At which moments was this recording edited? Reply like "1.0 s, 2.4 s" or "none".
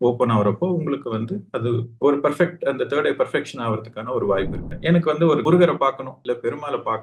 4.6 s